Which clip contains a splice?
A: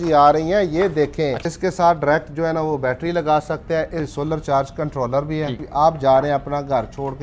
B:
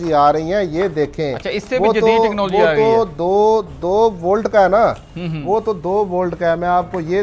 A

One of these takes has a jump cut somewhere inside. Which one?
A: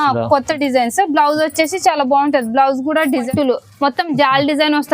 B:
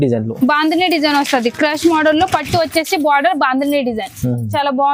A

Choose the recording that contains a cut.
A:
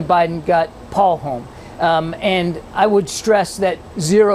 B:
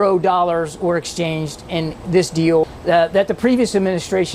B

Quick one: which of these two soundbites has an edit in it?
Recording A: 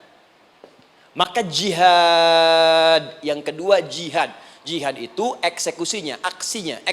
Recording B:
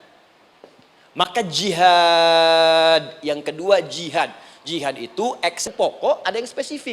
B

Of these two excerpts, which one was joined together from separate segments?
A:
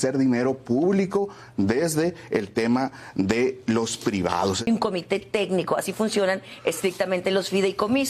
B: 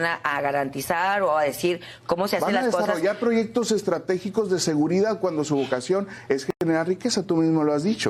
A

